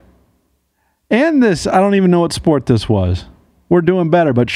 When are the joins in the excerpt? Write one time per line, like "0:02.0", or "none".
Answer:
none